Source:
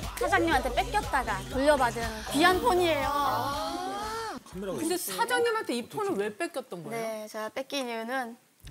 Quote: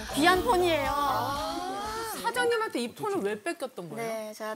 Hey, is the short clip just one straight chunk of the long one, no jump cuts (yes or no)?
no